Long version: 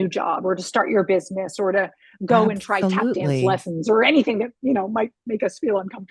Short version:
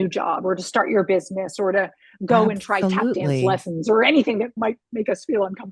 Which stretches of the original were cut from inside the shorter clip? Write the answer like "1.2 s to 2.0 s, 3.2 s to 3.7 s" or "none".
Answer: 4.6 s to 4.9 s